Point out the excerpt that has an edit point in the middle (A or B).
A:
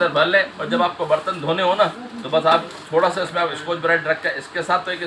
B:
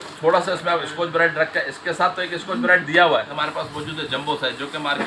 B